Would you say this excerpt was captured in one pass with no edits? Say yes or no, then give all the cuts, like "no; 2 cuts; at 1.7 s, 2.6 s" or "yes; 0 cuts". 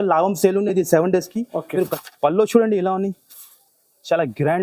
no; 1 cut; at 2.0 s